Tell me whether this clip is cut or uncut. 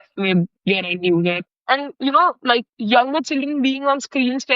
cut